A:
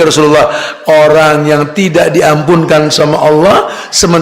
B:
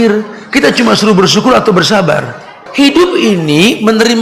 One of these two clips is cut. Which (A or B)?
B